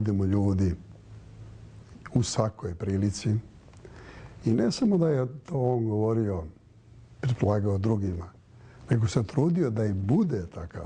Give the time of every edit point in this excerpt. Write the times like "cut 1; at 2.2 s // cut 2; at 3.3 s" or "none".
none